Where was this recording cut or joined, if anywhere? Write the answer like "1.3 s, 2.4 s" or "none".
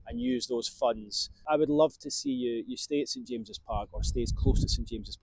1.4 s